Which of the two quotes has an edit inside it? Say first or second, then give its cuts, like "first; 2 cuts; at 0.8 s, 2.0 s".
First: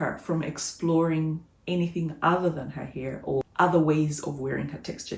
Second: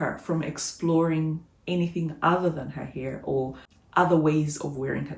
first; 1 cut; at 3.4 s